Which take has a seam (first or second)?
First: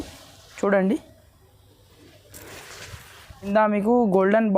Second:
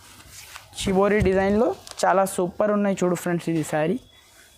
first